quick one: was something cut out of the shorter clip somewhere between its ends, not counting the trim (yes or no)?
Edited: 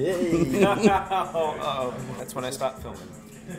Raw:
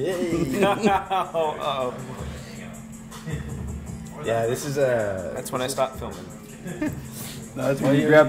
yes